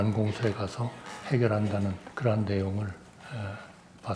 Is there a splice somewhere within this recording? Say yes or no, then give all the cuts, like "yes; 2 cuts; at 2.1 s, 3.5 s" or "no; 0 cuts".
yes; 1 cut; at 2.1 s